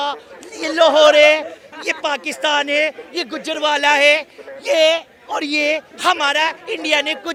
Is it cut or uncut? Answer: uncut